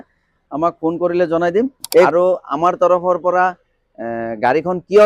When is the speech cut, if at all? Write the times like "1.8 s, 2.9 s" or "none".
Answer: 2.1 s